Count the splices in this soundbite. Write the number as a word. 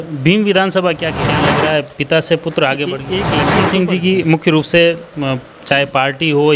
two